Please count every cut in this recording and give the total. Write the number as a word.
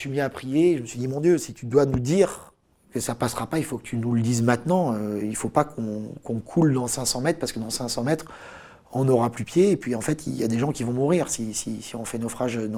zero